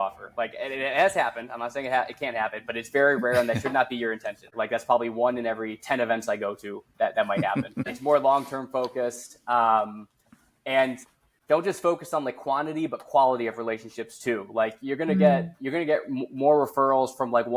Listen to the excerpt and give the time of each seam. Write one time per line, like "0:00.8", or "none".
0:04.5
0:07.9